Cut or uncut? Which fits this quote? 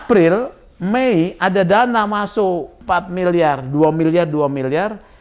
cut